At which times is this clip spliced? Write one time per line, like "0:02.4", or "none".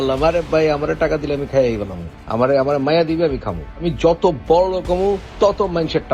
none